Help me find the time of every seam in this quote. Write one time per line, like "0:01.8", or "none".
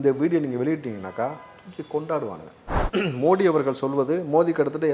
0:02.8